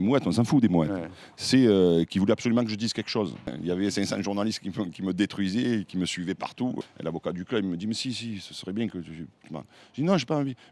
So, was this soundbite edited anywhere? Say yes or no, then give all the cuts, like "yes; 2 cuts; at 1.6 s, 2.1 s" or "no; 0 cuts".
yes; 2 cuts; at 3.6 s, 6.8 s